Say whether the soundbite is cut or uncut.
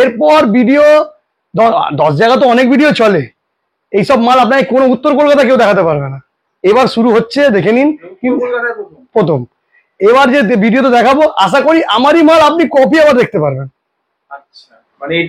uncut